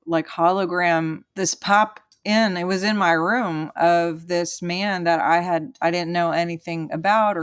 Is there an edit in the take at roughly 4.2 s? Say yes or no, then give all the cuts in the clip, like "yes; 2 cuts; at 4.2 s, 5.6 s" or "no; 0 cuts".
no; 1 cut; at 1.2 s